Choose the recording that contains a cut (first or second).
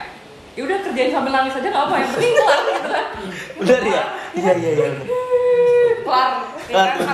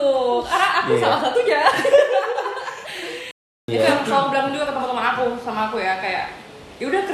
second